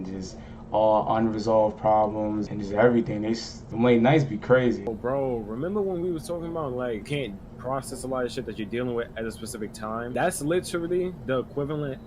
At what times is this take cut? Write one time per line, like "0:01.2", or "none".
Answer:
0:02.5
0:03.6
0:04.9
0:07.1
0:10.1